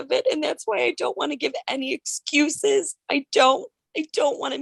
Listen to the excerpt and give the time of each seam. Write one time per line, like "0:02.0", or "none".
none